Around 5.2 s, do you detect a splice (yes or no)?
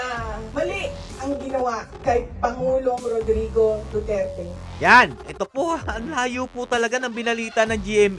yes